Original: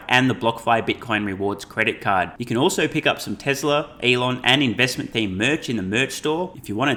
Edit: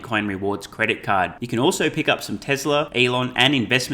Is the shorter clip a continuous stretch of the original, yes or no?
no